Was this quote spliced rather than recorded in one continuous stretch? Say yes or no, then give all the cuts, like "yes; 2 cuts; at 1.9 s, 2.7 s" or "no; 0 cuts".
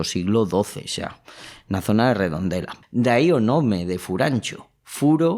yes; 1 cut; at 2.7 s